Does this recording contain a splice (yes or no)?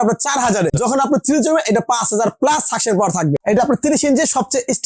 yes